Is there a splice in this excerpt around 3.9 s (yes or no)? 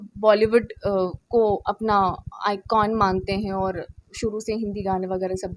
no